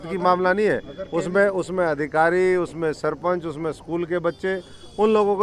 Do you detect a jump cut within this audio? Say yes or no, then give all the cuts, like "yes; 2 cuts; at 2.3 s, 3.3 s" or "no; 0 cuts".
no; 0 cuts